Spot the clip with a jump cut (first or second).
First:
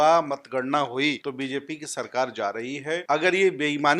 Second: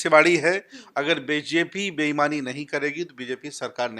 first